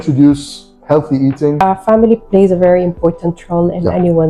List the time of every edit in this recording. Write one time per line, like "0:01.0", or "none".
0:01.6

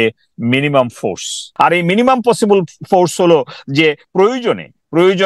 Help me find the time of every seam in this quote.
0:01.4

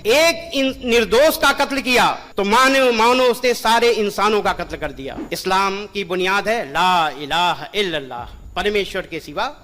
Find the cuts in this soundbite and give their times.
0:05.1

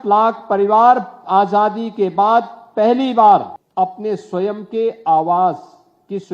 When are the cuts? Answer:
0:03.6

